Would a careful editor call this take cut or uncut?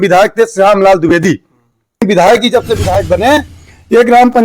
cut